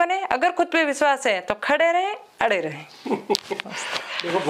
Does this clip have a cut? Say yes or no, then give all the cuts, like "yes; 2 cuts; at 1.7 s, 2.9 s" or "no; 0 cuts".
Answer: no; 0 cuts